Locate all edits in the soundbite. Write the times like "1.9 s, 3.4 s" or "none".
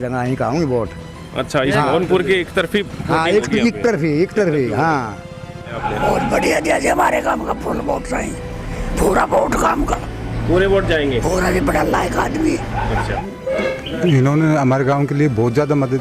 5.8 s, 13.1 s